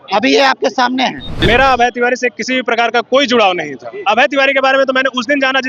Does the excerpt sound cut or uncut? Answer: cut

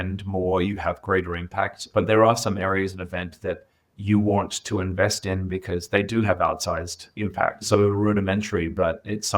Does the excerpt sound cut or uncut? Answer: cut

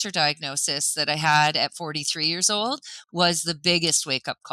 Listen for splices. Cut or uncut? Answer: uncut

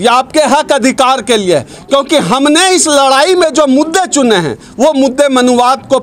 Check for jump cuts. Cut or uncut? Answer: uncut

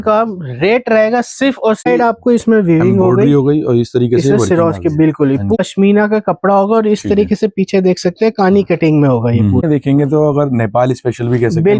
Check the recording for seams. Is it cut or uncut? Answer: cut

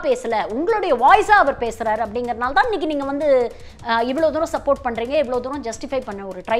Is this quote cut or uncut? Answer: uncut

